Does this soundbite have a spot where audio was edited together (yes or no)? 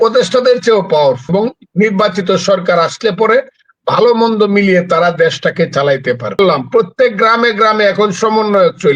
yes